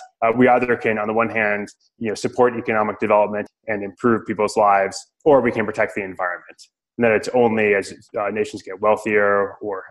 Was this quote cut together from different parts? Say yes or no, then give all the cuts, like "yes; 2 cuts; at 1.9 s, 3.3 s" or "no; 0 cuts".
yes; 2 cuts; at 3.5 s, 5.0 s